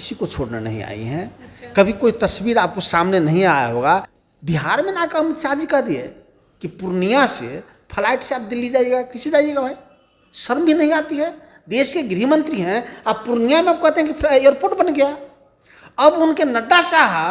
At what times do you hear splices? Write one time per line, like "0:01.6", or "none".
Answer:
0:04.1